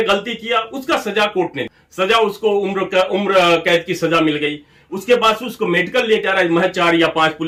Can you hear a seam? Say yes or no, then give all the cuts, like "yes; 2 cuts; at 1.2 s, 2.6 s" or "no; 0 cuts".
no; 0 cuts